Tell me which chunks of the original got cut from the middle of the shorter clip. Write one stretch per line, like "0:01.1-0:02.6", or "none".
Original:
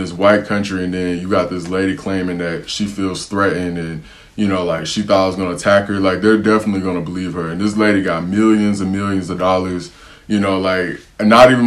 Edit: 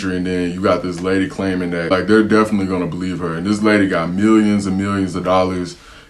0:02.6-0:06.0